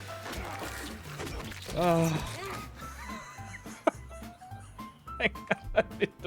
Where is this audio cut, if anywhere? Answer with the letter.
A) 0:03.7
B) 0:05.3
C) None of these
C